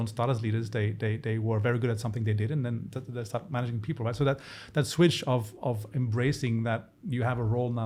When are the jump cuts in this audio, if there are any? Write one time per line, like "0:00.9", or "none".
none